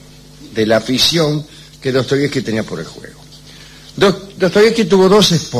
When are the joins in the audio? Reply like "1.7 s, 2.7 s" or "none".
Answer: 4.5 s

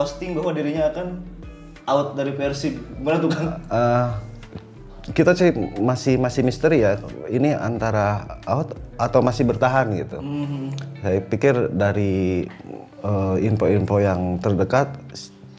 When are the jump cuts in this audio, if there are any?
none

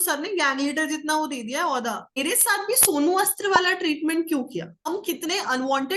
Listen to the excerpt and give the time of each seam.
2.2 s, 4.9 s

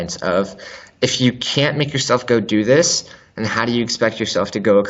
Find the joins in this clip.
none

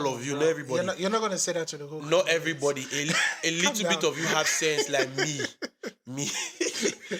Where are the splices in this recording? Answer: none

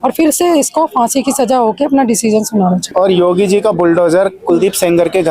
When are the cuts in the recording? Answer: 2.8 s

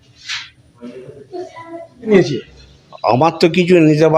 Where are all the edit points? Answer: 2.1 s

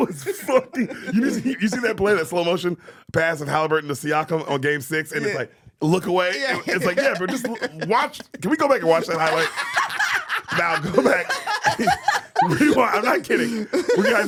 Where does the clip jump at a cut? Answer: none

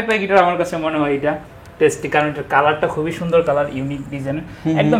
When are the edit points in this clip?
none

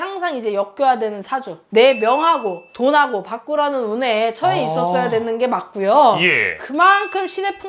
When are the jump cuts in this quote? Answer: 1.6 s, 6.6 s

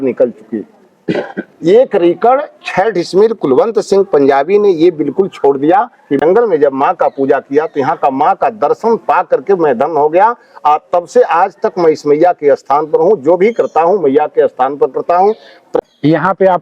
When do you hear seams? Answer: 6.2 s, 15.7 s

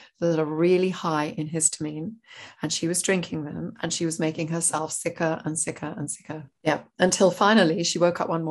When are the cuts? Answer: 6.6 s

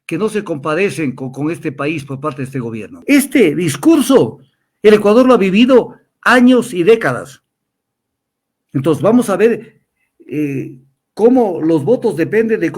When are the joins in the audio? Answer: 3.0 s

